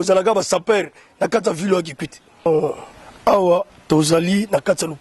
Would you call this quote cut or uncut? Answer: cut